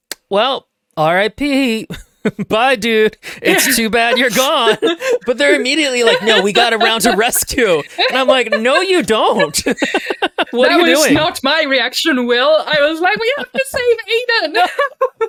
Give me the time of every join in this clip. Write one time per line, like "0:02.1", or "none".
none